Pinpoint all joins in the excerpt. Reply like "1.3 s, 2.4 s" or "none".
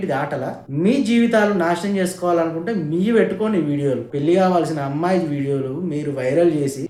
none